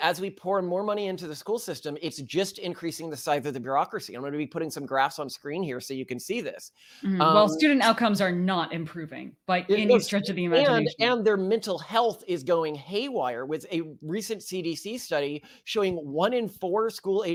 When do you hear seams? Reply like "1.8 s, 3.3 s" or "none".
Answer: none